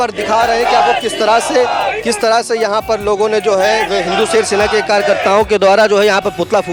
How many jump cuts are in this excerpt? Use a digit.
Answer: 0